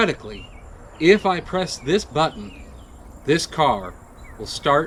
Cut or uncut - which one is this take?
uncut